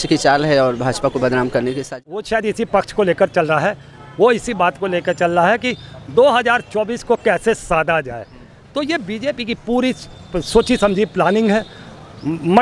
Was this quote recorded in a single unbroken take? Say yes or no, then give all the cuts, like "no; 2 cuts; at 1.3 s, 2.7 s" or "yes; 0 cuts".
no; 1 cut; at 1.9 s